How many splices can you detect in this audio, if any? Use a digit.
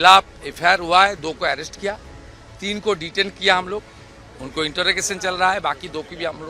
0